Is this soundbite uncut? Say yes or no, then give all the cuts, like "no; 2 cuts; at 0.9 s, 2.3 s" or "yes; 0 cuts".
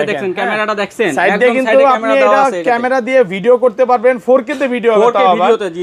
yes; 0 cuts